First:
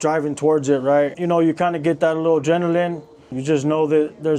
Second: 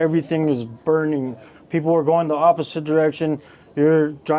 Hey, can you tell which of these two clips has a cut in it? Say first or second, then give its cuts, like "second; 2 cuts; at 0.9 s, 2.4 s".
first; 2 cuts; at 1.2 s, 3.4 s